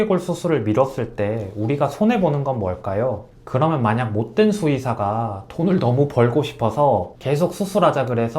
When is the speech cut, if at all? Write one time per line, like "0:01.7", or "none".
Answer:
0:03.3

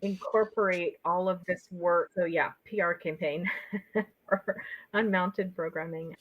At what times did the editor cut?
0:02.1

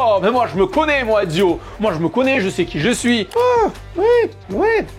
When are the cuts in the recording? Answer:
0:03.3

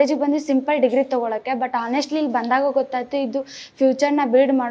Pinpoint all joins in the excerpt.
none

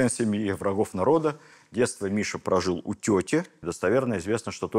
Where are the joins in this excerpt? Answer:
0:03.6

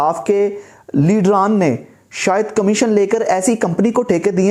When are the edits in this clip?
none

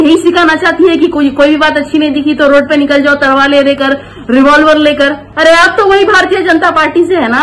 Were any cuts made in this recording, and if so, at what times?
0:05.2

